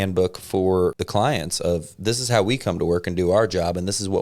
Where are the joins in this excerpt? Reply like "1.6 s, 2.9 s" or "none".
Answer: 1.0 s